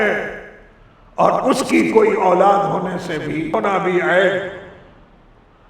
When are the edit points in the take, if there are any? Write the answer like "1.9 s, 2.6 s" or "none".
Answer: 3.5 s